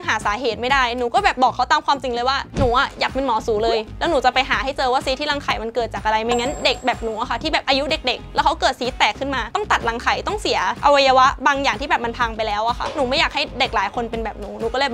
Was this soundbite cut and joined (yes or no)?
no